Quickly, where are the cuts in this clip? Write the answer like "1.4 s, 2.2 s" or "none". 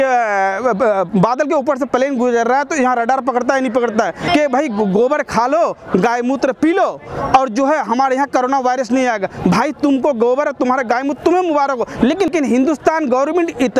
4.3 s, 12.3 s